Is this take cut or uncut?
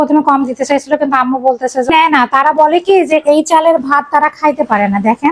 cut